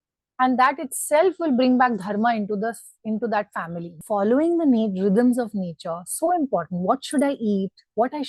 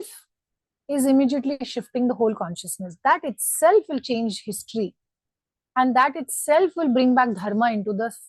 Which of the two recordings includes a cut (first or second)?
first